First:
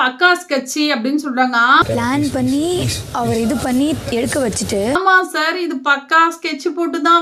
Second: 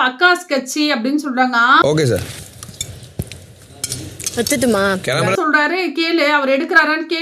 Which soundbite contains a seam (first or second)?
second